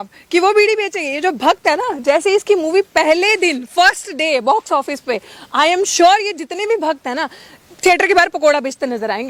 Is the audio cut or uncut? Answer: uncut